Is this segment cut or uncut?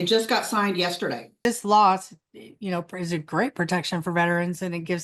cut